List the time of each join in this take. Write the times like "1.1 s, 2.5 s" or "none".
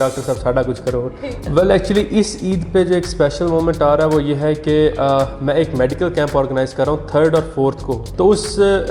1.3 s, 8.0 s